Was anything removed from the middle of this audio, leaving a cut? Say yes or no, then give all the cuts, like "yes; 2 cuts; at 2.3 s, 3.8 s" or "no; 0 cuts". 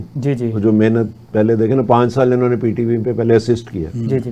no; 0 cuts